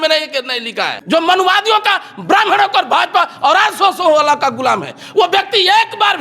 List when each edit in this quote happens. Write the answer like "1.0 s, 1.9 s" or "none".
1.0 s